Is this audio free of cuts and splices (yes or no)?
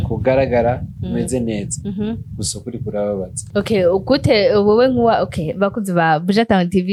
yes